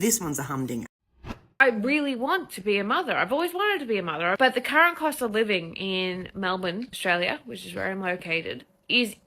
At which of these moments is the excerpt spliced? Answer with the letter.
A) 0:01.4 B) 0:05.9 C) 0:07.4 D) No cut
A